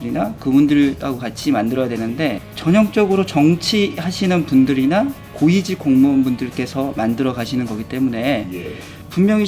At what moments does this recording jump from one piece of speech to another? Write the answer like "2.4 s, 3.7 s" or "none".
2.4 s, 5.2 s